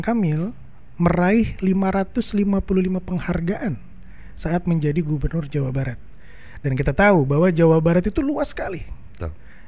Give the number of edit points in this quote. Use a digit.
0